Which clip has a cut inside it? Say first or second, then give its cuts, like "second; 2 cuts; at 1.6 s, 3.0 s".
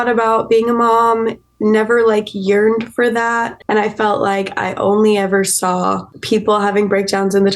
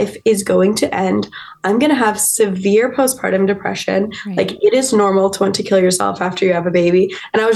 first; 2 cuts; at 3.5 s, 6.1 s